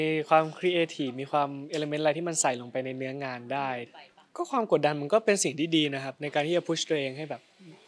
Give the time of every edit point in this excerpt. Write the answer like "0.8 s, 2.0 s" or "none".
3.9 s